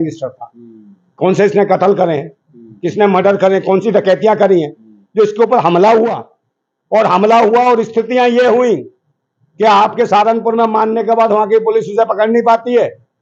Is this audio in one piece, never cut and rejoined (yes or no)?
yes